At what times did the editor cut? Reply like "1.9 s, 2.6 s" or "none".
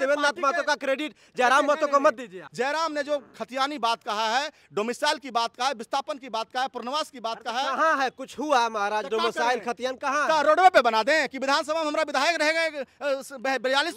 2.4 s

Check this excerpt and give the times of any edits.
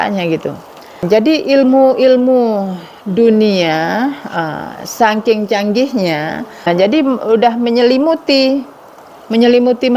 1.0 s, 6.7 s

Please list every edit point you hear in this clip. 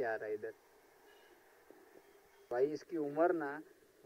2.5 s

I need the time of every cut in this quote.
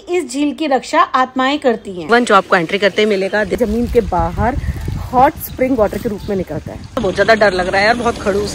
2.0 s, 3.6 s, 7.0 s

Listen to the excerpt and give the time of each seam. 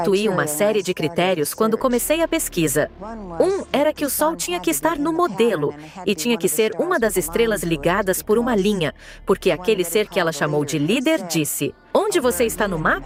none

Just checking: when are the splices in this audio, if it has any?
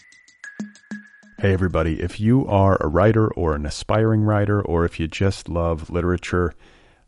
0.9 s

